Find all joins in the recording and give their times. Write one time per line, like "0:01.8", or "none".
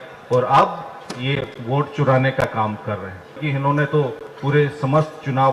0:03.5